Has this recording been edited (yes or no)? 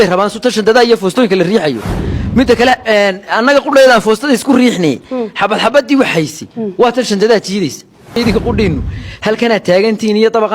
yes